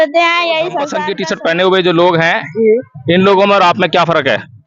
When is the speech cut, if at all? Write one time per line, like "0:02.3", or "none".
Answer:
0:01.0